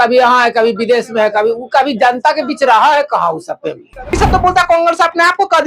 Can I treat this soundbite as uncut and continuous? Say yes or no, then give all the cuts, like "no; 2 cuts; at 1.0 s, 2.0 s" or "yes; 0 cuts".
no; 1 cut; at 4.1 s